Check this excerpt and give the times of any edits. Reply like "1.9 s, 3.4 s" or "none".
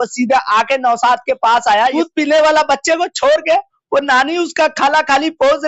1.9 s